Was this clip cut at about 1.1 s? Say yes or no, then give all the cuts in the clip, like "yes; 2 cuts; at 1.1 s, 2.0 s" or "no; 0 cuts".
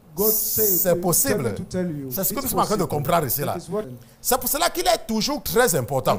no; 1 cut; at 3.9 s